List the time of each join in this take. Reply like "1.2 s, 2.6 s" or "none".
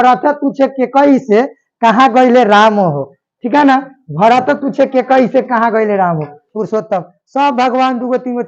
6.4 s